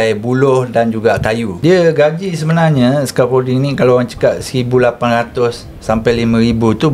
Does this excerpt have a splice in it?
yes; 1 cut; at 1.5 s

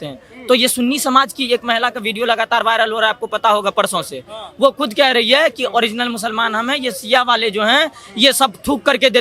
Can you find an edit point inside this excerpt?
no; 0 cuts

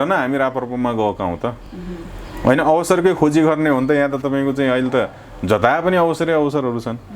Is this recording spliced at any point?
no; 0 cuts

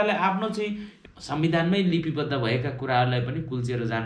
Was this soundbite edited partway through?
yes; 1 cut; at 0.9 s

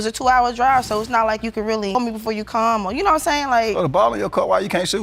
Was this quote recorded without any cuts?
yes; 0 cuts

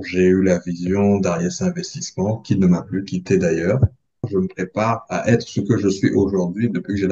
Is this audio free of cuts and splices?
no; 1 cut; at 4.3 s

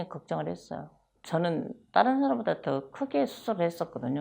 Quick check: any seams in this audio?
yes; 1 cut; at 1.0 s

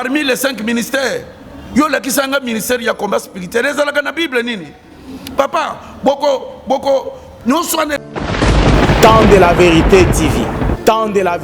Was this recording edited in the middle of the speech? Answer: yes; 1 cut; at 8.0 s

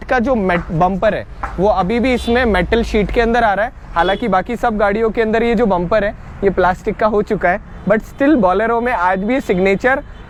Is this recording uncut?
yes; 0 cuts

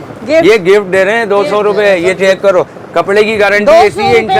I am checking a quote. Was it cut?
no; 0 cuts

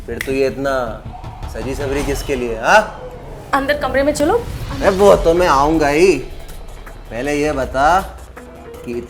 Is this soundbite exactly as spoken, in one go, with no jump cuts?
yes; 0 cuts

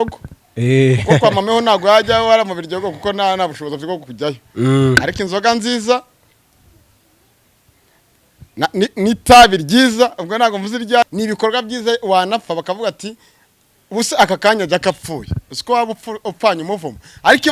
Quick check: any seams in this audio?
yes; 1 cut; at 11.1 s

